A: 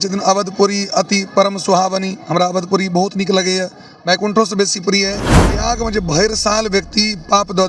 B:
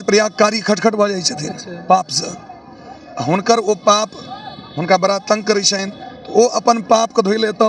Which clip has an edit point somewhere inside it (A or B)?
A